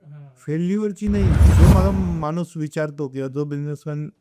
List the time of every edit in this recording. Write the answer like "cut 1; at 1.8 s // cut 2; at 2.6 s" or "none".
cut 1; at 1.5 s